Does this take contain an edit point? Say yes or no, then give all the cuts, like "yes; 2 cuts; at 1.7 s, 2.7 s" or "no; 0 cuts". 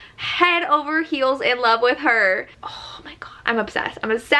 yes; 1 cut; at 2.6 s